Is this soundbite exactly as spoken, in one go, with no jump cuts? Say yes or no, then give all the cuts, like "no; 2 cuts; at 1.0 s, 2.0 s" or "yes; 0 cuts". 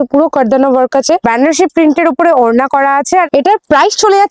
no; 2 cuts; at 1.2 s, 3.3 s